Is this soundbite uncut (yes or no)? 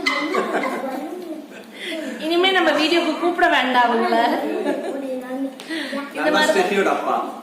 yes